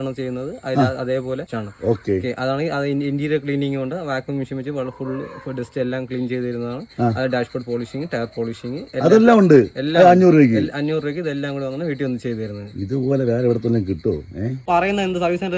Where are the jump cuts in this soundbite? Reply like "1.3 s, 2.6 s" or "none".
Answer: 1.5 s, 14.6 s